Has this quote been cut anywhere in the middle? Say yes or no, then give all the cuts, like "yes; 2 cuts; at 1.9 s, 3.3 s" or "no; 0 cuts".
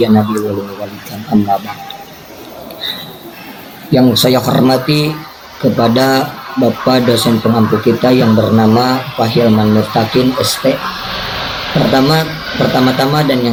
no; 0 cuts